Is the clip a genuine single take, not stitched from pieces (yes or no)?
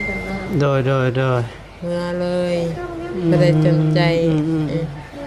yes